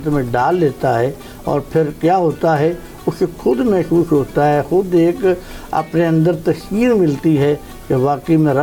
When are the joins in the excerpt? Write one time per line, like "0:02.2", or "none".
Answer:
none